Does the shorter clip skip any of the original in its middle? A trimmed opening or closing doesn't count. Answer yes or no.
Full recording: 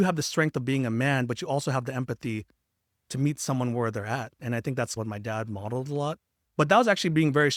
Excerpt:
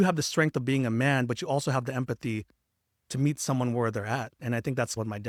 no